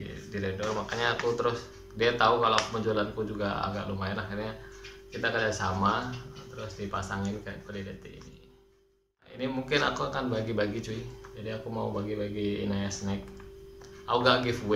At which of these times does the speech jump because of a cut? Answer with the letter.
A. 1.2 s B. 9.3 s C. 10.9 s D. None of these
B